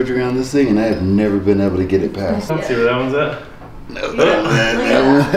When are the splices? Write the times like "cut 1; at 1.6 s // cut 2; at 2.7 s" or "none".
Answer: cut 1; at 2.5 s